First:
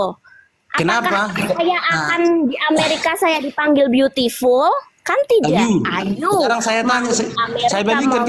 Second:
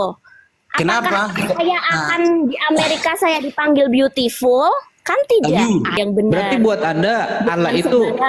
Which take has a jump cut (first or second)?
second